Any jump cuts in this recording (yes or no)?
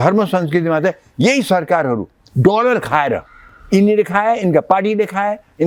no